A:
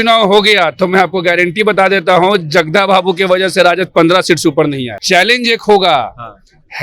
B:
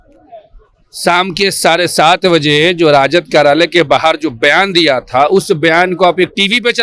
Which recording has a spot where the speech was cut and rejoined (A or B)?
A